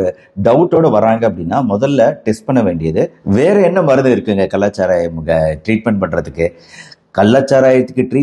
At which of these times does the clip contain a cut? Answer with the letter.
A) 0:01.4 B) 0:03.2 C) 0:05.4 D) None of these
B